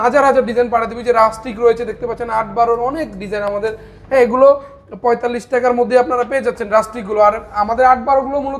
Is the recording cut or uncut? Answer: uncut